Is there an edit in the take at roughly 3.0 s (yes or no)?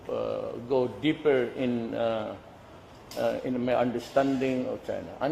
no